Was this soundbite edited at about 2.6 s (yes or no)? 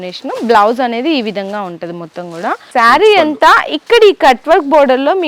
yes